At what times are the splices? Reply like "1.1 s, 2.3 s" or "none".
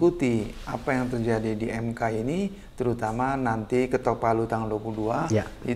none

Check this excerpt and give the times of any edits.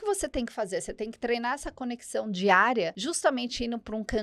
3.0 s

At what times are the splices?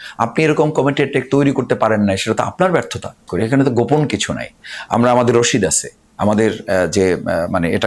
3.3 s

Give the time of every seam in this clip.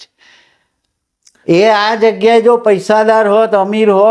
none

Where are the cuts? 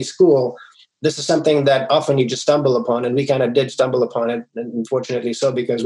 none

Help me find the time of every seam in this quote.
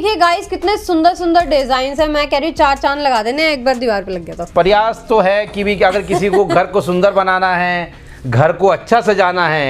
none

